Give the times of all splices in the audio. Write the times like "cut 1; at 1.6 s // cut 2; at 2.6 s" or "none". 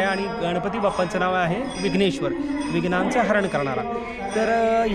none